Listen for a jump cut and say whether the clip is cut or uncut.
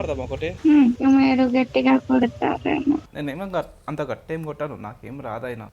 cut